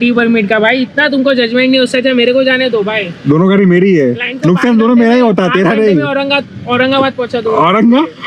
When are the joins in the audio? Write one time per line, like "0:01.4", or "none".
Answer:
none